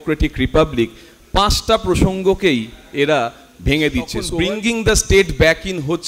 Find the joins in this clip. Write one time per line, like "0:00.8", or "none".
0:04.2